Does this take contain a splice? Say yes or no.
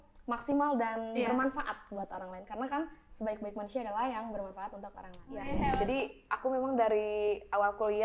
yes